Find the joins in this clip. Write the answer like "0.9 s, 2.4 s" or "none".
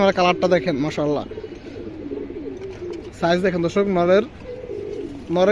none